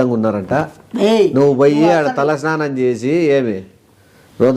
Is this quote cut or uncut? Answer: uncut